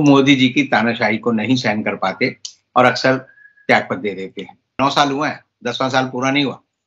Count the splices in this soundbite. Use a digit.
1